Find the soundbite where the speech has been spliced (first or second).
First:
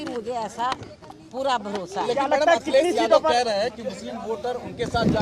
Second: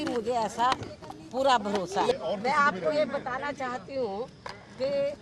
second